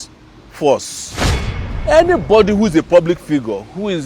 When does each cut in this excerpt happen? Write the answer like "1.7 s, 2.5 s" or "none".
1.5 s